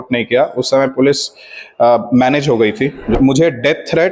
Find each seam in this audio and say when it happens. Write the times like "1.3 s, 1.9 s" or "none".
3.1 s